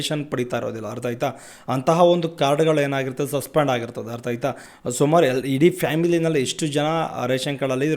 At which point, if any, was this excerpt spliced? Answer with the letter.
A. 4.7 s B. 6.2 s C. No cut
A